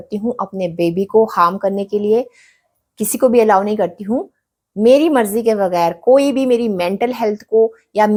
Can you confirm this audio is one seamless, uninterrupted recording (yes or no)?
yes